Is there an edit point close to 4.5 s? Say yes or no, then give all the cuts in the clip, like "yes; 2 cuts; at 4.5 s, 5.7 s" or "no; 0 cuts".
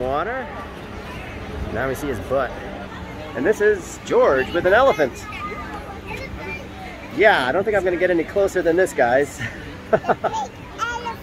no; 1 cut; at 2.9 s